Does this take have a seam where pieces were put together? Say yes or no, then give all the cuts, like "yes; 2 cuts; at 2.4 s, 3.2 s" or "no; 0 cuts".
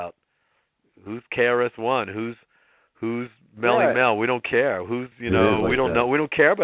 yes; 1 cut; at 5.1 s